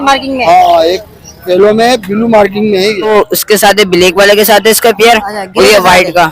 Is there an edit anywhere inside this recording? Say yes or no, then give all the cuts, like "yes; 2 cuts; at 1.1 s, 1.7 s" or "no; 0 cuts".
yes; 1 cut; at 3.1 s